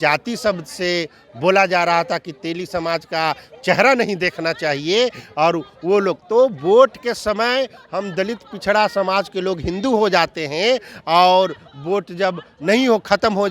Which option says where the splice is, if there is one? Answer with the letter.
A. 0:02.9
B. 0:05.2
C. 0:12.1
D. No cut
D